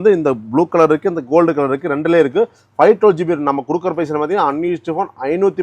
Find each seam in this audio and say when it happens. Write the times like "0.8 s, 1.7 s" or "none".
none